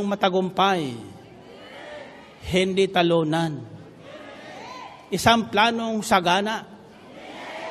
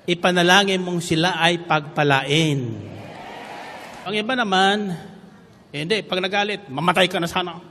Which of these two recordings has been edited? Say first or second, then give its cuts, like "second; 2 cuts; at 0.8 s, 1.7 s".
second; 1 cut; at 4.1 s